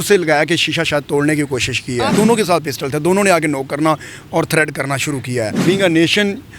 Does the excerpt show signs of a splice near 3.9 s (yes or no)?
no